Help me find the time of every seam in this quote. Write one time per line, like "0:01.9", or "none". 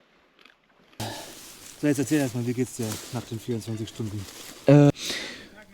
0:01.0
0:04.9